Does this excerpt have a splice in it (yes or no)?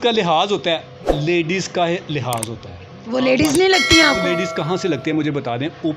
no